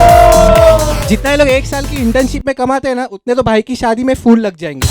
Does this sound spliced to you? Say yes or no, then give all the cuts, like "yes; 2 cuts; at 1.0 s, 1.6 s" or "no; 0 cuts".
yes; 1 cut; at 1.1 s